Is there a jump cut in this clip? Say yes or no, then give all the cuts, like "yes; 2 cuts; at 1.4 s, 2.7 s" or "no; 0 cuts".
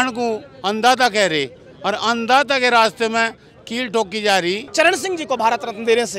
yes; 1 cut; at 4.7 s